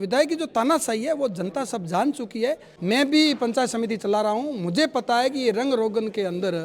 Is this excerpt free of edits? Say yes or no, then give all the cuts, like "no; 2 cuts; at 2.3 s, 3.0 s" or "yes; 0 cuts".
no; 1 cut; at 2.7 s